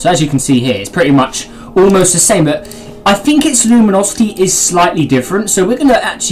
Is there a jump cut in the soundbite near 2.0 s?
no; 1 cut; at 3.3 s

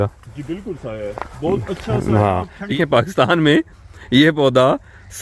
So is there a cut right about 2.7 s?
yes; 1 cut; at 2.7 s

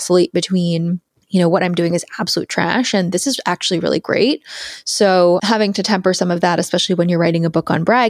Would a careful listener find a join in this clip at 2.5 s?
no; 2 cuts; at 1.1 s, 5.4 s

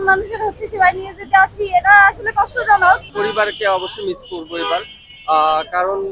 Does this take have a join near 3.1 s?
yes; 1 cut; at 3.1 s

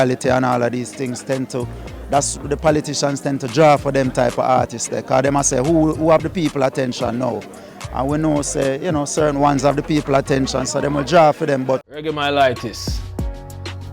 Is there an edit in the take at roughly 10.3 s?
no; 1 cut; at 12.0 s

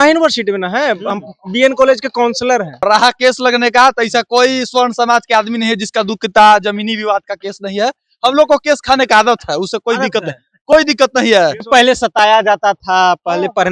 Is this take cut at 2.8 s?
yes; 2 cuts; at 2.8 s, 11.6 s

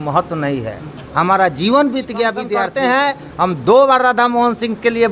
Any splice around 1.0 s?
no; 1 cut; at 2.6 s

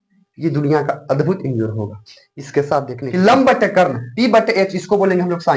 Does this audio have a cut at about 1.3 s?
no; 1 cut; at 3.0 s

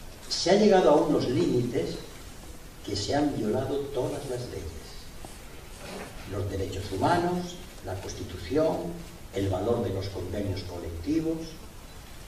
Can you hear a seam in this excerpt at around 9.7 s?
no; 1 cut; at 11.1 s

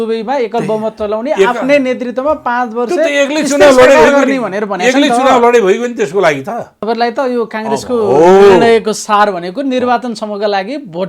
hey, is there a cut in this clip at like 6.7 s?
yes; 1 cut; at 6.7 s

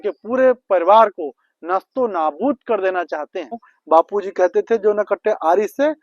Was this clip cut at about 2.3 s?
no; 1 cut; at 3.7 s

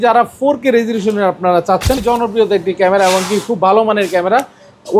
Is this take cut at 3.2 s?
no; 1 cut; at 2.0 s

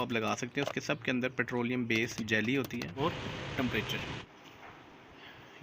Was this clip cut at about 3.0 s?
yes; 1 cut; at 3.0 s

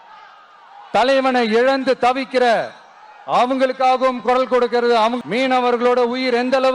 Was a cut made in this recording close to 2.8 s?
no; 1 cut; at 5.2 s

